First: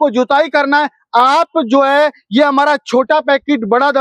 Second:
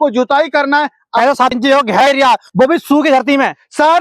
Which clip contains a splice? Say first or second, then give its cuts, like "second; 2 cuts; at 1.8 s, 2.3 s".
second; 1 cut; at 1.2 s